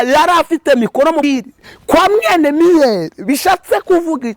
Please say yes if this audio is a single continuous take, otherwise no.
no